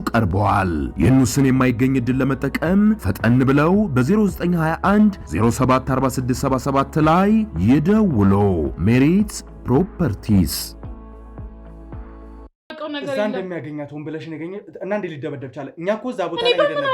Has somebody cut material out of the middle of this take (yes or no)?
yes